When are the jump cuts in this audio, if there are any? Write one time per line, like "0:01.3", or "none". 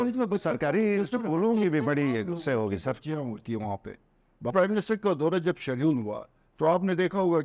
0:04.5

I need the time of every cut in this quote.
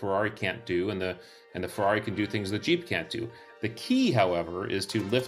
none

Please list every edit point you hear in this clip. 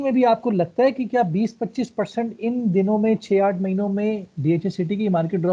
none

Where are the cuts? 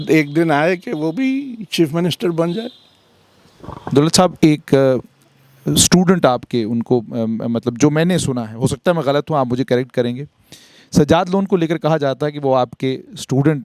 none

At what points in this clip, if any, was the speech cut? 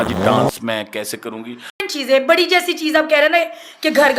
0:01.8

